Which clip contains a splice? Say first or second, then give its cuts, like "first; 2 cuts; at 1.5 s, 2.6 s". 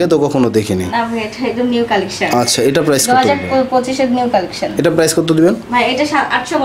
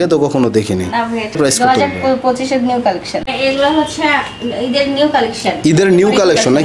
second; 2 cuts; at 1.4 s, 3.2 s